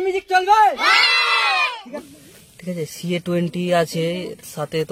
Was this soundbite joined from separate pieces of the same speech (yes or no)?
yes